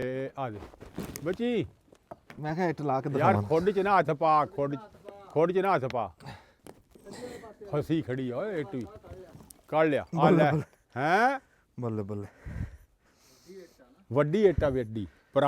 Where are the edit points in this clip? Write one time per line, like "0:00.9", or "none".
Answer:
0:06.5

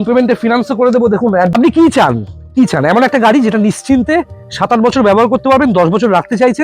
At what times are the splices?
0:01.5

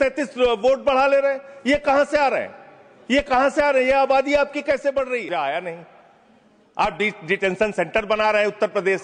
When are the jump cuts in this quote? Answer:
0:05.2

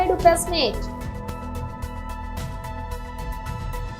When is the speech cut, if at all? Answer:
0:01.3

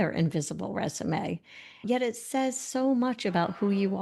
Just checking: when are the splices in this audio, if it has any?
0:01.8

